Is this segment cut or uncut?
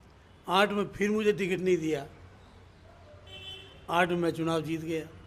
uncut